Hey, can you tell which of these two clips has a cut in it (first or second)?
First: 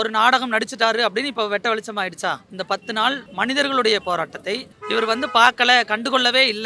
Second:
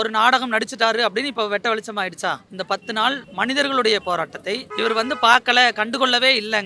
second